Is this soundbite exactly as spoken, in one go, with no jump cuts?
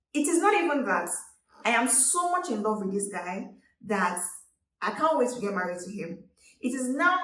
yes; 0 cuts

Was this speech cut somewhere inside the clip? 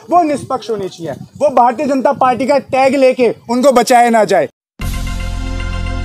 yes; 1 cut; at 4.6 s

